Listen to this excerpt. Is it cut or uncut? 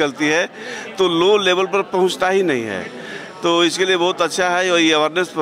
uncut